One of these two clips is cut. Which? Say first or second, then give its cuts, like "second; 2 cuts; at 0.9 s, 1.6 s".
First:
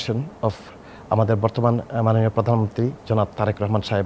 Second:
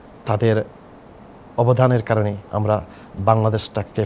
second; 1 cut; at 2.5 s